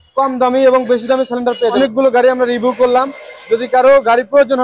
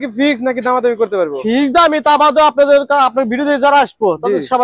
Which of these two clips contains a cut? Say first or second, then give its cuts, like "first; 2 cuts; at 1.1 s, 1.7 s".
first; 1 cut; at 1.8 s